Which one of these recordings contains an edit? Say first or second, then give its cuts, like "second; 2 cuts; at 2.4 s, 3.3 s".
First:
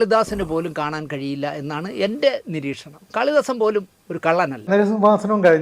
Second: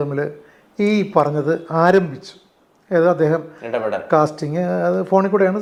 first; 1 cut; at 4.7 s